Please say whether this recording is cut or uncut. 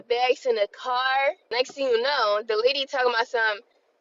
cut